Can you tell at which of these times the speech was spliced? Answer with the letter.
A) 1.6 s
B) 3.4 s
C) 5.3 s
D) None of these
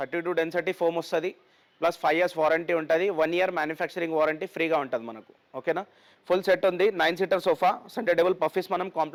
D